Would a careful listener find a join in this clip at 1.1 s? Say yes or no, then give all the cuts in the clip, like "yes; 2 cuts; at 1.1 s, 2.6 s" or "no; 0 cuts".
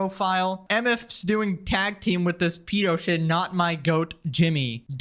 yes; 1 cut; at 1.1 s